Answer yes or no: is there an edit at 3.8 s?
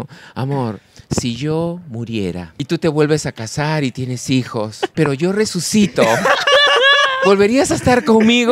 no